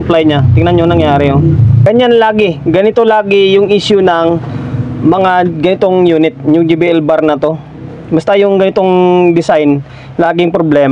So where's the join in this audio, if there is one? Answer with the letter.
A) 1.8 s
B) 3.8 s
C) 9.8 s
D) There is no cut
A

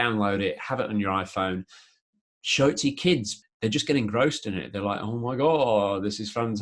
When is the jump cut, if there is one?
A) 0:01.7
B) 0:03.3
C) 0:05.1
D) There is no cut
B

